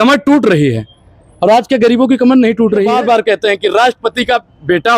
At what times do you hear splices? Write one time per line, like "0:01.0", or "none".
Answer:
0:02.9